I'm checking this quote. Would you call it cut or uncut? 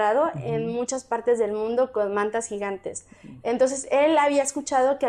uncut